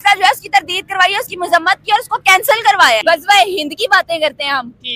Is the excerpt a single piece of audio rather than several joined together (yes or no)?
no